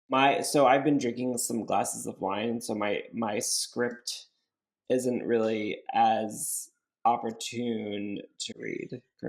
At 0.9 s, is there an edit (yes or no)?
no